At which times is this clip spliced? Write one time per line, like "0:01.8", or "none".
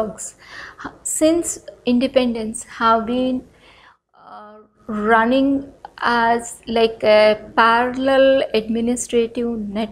none